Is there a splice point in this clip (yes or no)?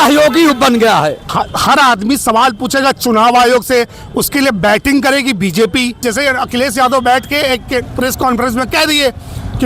yes